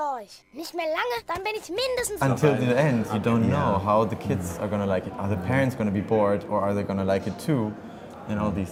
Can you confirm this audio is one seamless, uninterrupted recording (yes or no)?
yes